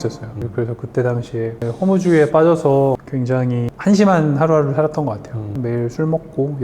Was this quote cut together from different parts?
yes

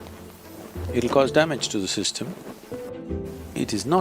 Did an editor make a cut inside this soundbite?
yes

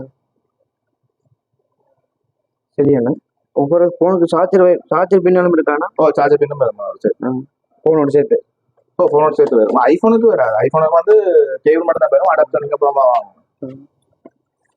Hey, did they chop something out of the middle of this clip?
no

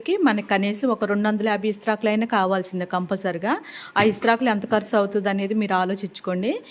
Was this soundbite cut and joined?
no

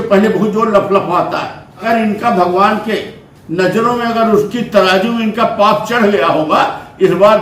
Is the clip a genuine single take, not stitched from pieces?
no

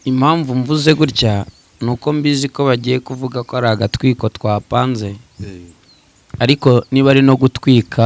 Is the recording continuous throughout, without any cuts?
yes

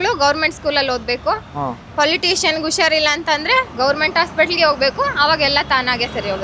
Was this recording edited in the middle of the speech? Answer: no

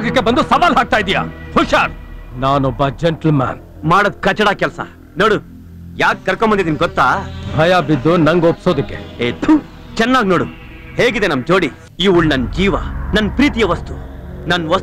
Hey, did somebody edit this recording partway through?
yes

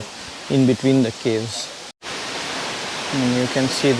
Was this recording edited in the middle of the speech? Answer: yes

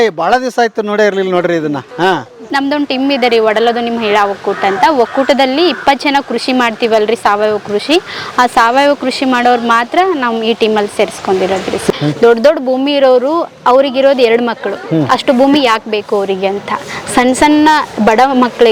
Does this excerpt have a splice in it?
yes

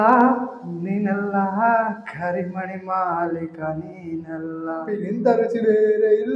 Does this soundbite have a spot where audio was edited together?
yes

